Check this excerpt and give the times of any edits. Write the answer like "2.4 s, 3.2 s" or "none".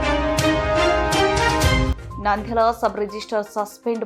1.9 s